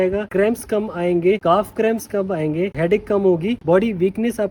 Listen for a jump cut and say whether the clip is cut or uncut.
cut